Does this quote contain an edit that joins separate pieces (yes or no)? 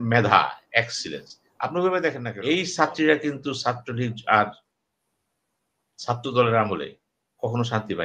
yes